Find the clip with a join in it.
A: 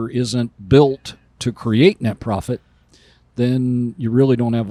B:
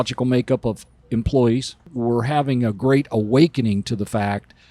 B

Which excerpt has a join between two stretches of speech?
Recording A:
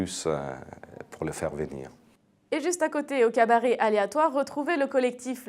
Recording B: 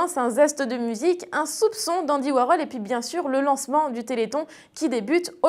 A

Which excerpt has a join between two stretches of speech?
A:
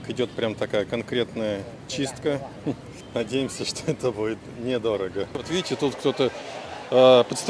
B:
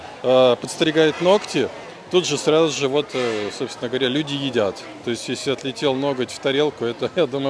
A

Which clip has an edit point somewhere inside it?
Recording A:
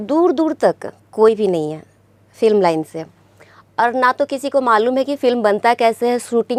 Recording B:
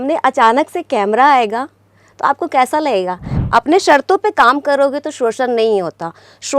B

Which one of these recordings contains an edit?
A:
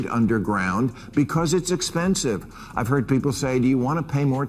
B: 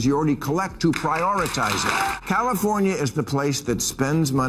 B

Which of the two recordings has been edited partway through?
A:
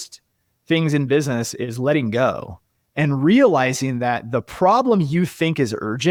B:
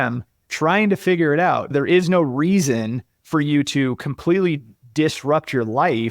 B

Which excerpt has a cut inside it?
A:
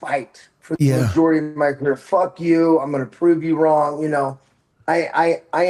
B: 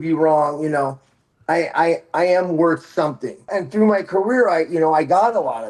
B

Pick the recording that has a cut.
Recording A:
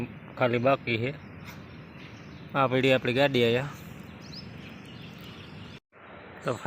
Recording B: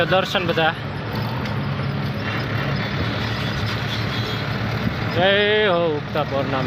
A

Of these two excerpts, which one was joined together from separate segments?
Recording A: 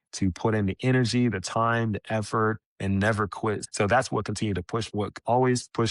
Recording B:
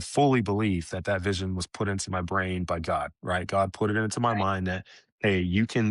A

